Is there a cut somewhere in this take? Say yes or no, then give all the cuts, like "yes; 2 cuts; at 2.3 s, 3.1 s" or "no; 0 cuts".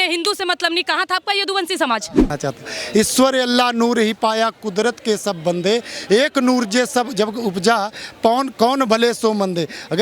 yes; 1 cut; at 2.3 s